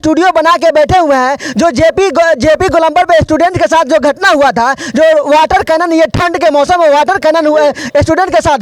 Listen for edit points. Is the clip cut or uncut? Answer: uncut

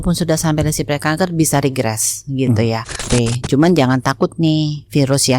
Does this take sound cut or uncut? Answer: cut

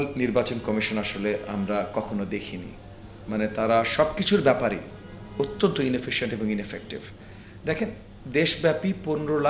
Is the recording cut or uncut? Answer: uncut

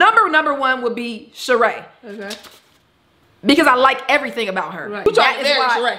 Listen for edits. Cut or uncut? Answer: cut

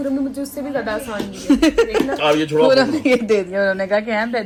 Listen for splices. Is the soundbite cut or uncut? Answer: uncut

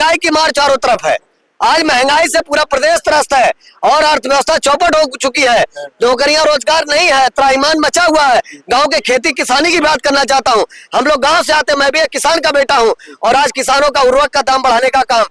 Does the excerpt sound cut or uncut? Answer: uncut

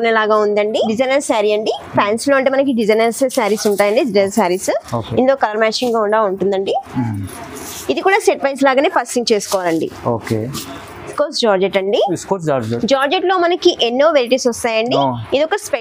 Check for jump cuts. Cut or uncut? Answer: cut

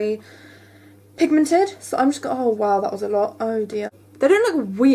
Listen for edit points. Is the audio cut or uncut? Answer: cut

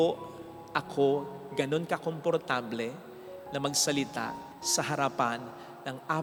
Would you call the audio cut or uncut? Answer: uncut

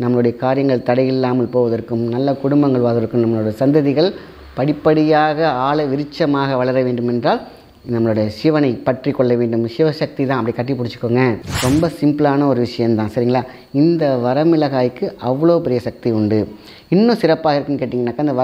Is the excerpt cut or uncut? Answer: cut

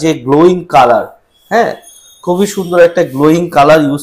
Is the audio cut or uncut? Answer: uncut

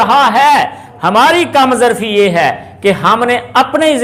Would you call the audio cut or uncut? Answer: uncut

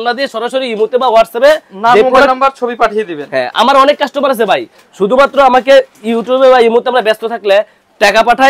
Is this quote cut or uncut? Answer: uncut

